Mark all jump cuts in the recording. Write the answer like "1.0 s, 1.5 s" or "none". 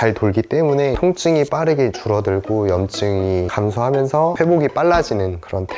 none